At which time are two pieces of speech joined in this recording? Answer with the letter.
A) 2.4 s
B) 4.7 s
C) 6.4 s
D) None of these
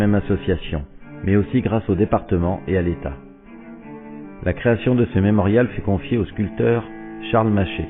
C